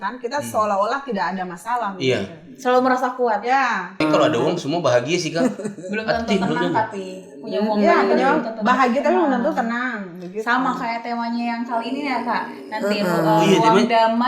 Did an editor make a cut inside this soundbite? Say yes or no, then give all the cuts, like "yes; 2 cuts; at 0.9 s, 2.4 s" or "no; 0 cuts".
yes; 1 cut; at 4.0 s